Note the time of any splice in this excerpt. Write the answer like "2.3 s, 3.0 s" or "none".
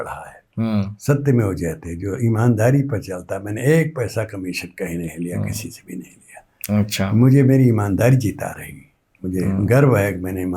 none